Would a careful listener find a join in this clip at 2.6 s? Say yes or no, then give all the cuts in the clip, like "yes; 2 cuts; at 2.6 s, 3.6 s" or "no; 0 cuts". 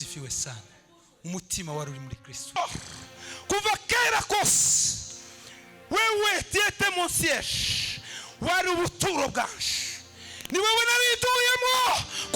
yes; 1 cut; at 2.6 s